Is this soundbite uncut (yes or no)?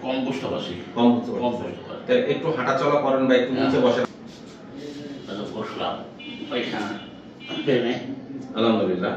no